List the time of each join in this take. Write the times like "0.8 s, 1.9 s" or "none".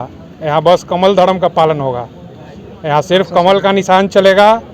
none